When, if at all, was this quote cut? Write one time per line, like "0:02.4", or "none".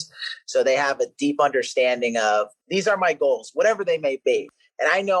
0:02.6
0:04.3